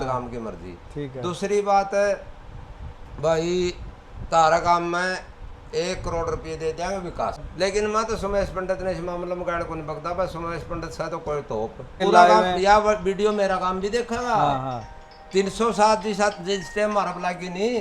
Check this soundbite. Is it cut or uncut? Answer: cut